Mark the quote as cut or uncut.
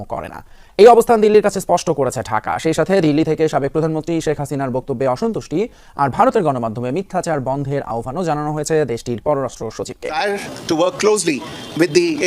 cut